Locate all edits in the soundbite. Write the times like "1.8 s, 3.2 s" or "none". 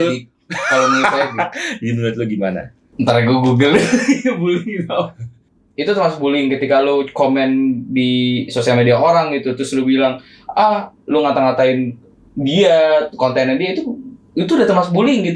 2.8 s, 5.4 s